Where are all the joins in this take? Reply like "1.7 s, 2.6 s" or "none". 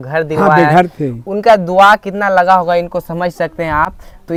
none